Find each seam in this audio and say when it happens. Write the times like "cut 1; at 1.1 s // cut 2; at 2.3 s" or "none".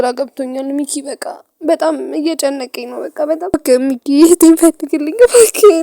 cut 1; at 3.5 s

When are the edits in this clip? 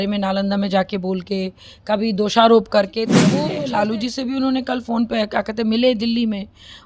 cut 1; at 3.4 s

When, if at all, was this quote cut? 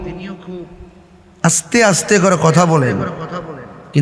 none

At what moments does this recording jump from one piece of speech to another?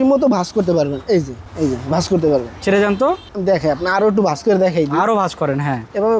none

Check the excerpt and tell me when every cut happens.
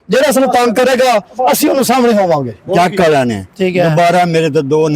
cut 1; at 2.6 s

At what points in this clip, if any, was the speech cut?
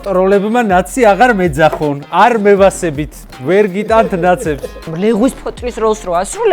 cut 1; at 4.7 s

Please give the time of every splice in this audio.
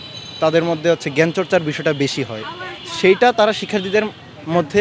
none

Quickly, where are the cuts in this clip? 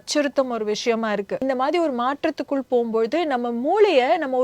cut 1; at 1.4 s

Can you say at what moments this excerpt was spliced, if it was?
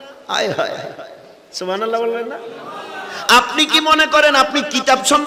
none

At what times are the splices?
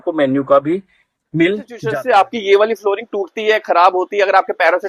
cut 1; at 1.8 s

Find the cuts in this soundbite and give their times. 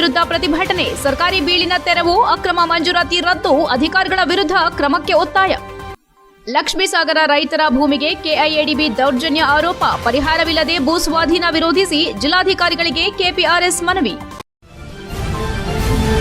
cut 1; at 14.3 s

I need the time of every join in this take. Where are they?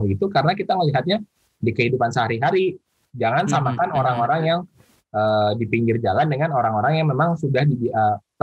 cut 1; at 3.0 s

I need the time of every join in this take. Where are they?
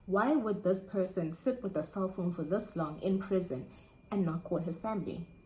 none

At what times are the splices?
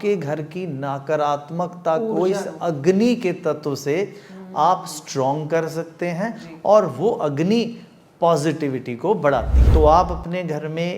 cut 1; at 9.6 s

